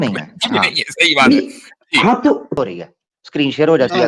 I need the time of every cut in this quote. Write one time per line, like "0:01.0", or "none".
0:02.6